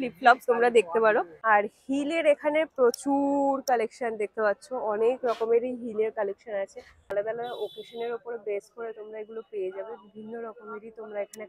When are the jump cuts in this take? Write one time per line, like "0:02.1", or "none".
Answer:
0:01.3
0:07.1